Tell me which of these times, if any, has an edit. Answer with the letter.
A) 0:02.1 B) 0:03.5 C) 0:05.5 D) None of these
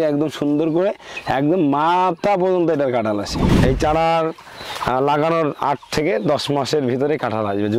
B